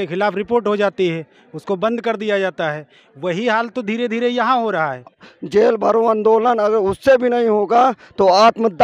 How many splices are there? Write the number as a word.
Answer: one